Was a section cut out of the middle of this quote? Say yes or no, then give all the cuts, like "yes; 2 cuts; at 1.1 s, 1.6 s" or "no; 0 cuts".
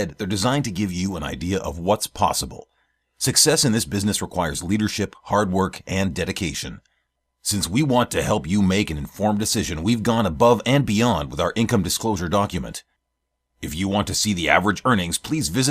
no; 0 cuts